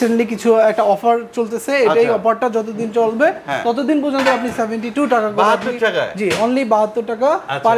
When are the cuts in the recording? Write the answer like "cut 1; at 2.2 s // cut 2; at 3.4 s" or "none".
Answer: none